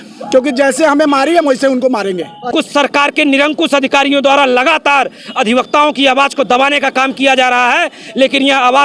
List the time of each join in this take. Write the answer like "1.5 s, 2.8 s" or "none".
2.5 s